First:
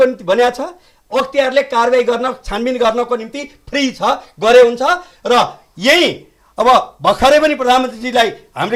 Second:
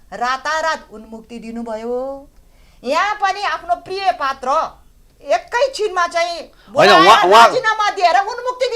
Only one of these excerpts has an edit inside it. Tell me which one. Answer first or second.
second